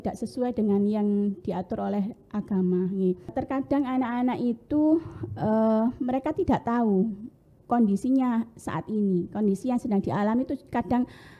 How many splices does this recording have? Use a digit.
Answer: 1